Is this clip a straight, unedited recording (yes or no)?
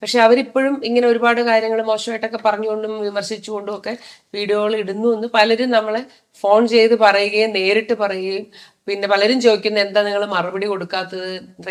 yes